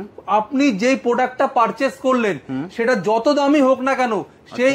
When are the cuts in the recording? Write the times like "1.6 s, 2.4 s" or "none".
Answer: none

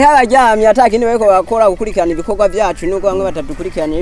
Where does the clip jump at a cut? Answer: none

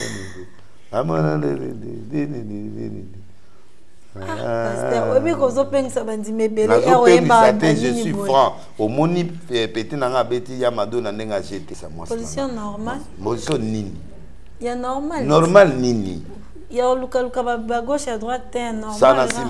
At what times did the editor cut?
11.7 s

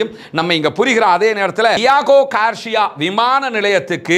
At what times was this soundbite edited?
1.8 s

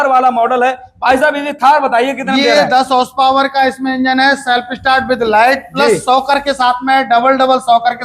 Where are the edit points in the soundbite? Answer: none

